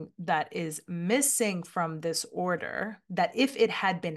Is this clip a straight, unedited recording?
yes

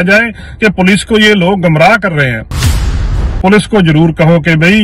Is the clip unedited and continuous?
no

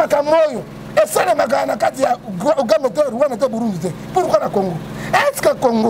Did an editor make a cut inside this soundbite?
no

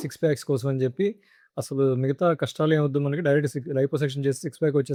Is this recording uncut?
yes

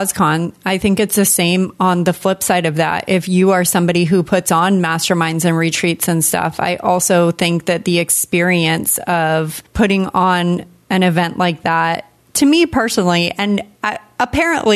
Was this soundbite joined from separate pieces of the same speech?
no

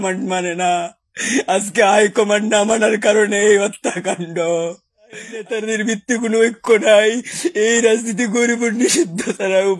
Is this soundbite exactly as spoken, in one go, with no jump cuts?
no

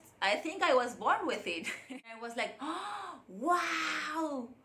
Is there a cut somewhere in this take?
yes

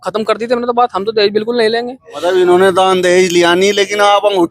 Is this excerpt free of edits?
no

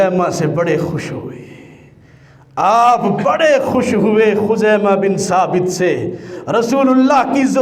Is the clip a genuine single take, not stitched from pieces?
yes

